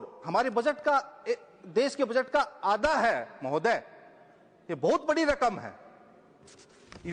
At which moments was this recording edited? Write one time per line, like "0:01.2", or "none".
none